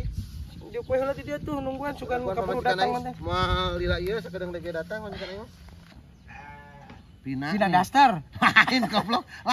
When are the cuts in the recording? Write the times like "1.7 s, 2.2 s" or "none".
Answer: 6.1 s